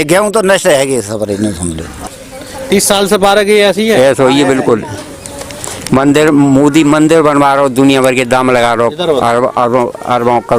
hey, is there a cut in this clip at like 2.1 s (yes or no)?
yes